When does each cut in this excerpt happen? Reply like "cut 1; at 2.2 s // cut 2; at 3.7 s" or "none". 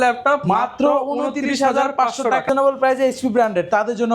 cut 1; at 2.5 s